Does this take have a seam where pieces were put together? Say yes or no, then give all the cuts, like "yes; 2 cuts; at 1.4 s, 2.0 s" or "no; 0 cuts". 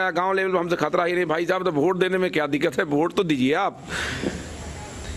no; 0 cuts